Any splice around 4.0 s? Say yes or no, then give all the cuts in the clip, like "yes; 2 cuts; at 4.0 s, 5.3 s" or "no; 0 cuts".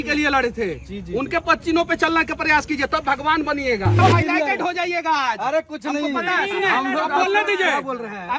yes; 1 cut; at 4.0 s